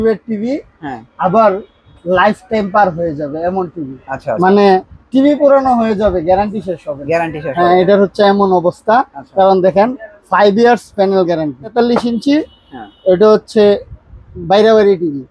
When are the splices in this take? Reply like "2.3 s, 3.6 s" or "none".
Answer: 11.7 s